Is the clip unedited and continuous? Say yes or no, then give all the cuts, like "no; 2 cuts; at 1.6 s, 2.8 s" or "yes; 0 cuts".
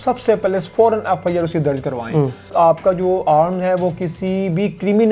no; 1 cut; at 2.5 s